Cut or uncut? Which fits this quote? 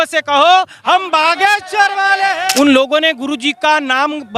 cut